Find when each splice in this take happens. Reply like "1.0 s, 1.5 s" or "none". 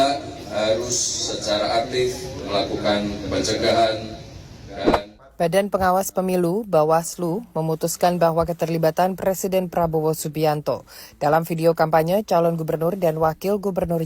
4.7 s

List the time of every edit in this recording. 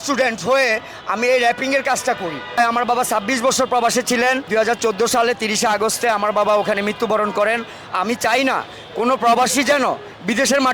2.6 s, 4.4 s

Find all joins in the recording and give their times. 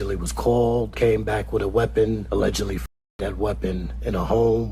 0.9 s, 2.2 s

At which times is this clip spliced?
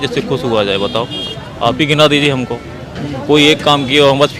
none

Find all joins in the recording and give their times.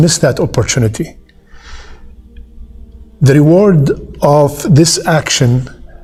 none

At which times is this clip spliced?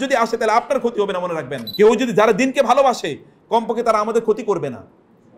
1.6 s

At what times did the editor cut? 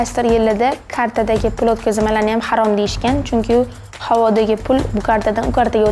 none

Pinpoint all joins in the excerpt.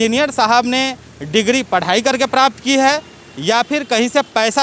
none

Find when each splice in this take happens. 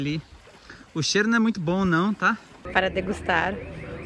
2.6 s

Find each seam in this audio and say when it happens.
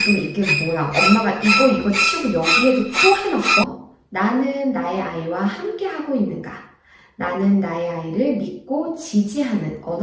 3.7 s

